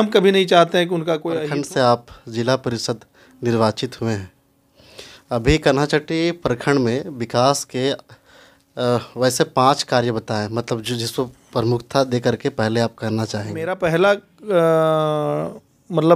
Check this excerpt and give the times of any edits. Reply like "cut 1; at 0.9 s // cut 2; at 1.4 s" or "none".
cut 1; at 1.4 s // cut 2; at 13.8 s